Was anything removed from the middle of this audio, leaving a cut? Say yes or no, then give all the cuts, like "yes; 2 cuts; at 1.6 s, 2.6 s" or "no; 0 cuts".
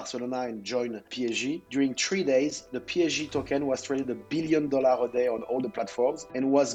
no; 0 cuts